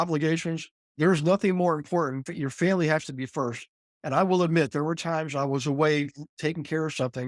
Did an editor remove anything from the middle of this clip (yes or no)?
no